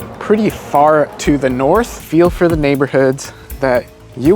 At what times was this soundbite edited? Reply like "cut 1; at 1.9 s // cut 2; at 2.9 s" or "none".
cut 1; at 2.0 s